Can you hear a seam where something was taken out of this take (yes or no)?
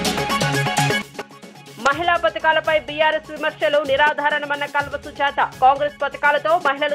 yes